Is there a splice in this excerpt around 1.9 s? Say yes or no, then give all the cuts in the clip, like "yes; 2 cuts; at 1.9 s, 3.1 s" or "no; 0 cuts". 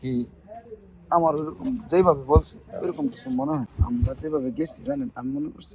no; 1 cut; at 3.7 s